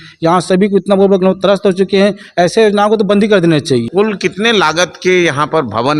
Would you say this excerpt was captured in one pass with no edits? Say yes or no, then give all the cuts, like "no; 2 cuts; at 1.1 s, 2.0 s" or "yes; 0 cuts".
no; 1 cut; at 3.9 s